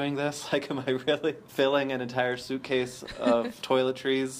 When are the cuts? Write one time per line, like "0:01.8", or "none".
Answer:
0:01.4
0:03.6